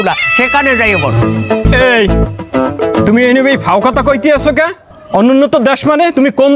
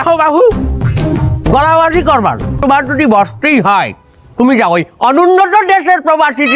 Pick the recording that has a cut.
second; 1 cut; at 2.6 s

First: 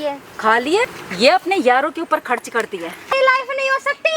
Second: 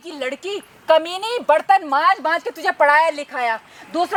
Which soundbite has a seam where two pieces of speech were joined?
first; 2 cuts; at 1.0 s, 3.1 s

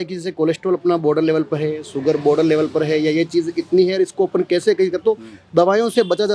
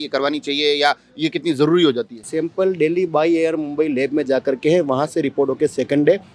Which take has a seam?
second; 1 cut; at 2.3 s

